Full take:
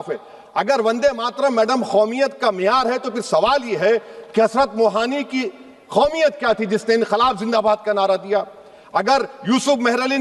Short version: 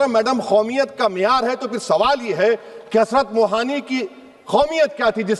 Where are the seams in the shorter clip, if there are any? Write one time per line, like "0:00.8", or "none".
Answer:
none